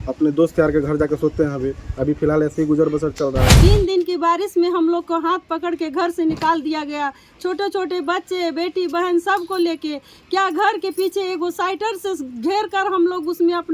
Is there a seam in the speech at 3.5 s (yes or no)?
yes